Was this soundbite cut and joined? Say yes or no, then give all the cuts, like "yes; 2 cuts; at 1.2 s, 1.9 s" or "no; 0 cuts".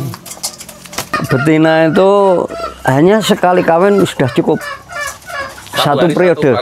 yes; 1 cut; at 1.1 s